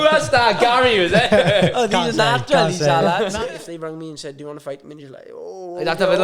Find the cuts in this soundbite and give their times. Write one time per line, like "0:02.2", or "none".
0:03.3

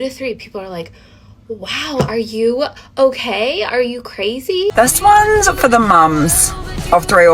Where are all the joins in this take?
0:04.7

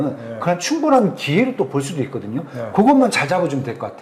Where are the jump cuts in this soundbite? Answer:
none

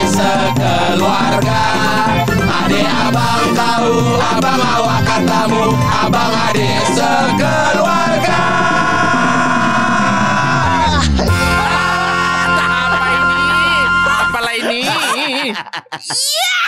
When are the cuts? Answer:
none

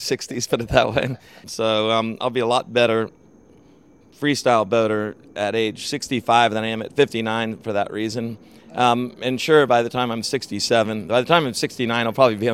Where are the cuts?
0:01.4

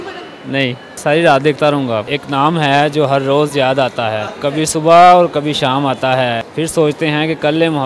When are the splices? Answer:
0:01.0
0:02.1
0:04.3
0:06.5

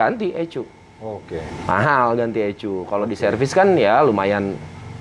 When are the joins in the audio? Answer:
none

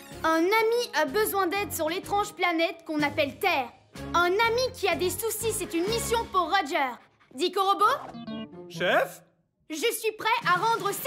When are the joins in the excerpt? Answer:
none

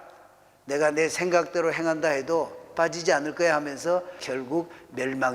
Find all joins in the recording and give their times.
0:04.2

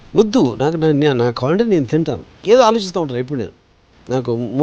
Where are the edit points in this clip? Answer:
0:02.2

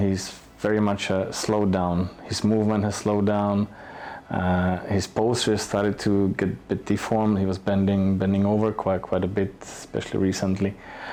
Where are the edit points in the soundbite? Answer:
none

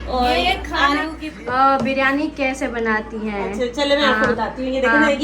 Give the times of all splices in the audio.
0:01.1

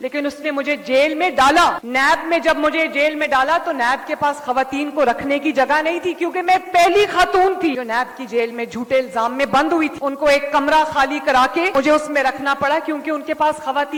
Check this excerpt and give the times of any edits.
none

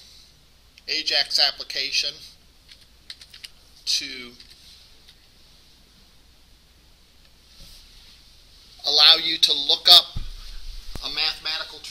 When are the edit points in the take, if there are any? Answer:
none

